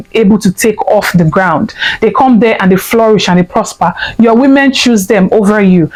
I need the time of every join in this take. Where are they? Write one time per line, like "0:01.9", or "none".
none